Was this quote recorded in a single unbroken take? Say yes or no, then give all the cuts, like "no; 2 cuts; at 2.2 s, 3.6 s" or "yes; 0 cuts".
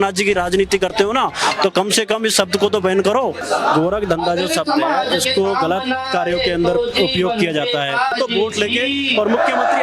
no; 2 cuts; at 3.4 s, 8.1 s